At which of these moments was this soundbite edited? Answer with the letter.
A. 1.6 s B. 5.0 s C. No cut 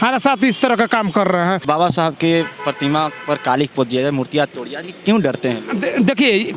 A